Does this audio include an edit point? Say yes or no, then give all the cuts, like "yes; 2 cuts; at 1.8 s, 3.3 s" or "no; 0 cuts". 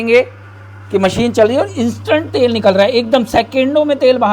no; 0 cuts